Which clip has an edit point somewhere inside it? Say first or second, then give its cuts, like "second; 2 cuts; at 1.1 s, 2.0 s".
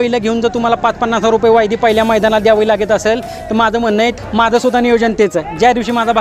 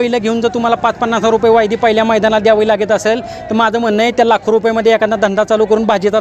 first; 1 cut; at 4.1 s